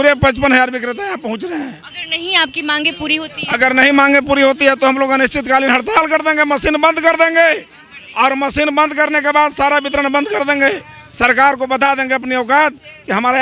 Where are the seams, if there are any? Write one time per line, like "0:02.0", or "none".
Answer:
none